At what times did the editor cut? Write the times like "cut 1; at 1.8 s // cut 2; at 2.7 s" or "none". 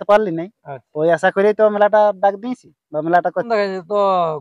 cut 1; at 3.5 s